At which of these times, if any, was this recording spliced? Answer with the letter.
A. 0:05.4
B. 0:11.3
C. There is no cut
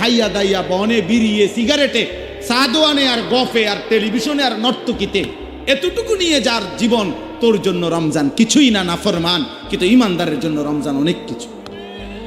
B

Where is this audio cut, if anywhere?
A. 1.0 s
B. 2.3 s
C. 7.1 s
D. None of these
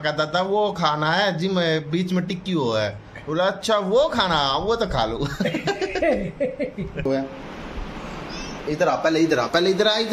C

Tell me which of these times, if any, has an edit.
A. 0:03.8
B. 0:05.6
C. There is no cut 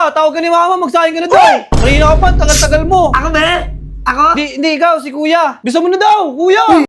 B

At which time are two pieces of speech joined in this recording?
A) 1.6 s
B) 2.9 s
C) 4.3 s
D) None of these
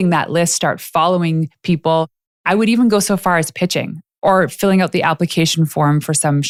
D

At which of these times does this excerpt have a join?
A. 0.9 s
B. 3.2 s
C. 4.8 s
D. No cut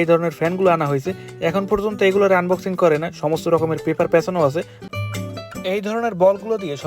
C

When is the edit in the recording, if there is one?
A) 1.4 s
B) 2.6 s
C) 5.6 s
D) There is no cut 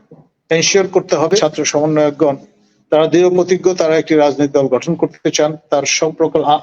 A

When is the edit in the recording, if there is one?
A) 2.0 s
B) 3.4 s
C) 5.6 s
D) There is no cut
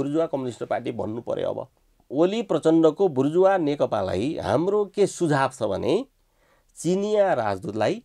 A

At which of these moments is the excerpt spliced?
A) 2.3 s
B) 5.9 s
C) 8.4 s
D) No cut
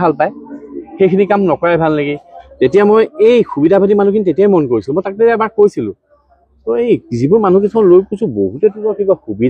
A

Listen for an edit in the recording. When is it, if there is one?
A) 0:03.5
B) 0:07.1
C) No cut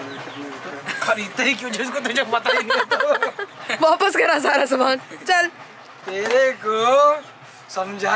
A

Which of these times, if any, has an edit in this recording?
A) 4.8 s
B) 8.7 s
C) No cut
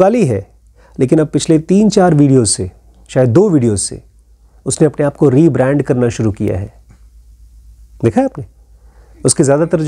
C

